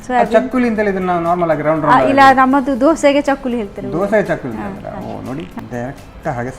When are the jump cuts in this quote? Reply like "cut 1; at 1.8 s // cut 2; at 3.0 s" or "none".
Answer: cut 1; at 5.5 s